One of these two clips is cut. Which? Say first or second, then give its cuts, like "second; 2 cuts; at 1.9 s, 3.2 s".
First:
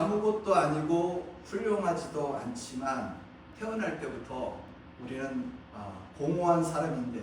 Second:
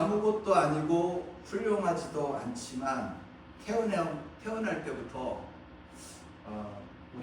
first; 2 cuts; at 3.5 s, 4.8 s